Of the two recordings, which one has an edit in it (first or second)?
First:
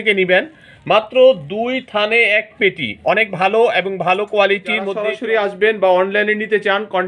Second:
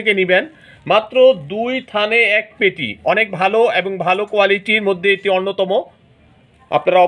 first